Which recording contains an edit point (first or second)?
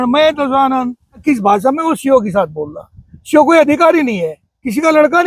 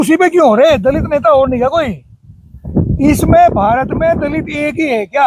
first